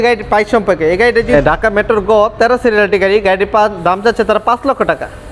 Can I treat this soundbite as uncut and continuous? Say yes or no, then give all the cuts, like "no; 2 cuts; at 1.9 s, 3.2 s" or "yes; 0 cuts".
no; 1 cut; at 1.3 s